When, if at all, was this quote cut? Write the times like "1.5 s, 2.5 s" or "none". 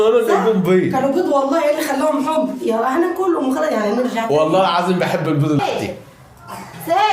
5.6 s